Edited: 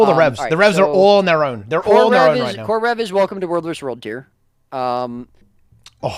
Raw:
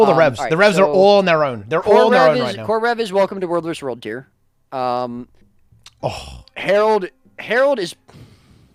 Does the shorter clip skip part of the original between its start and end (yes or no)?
no